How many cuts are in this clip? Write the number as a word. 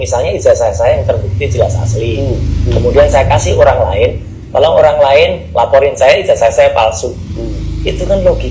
zero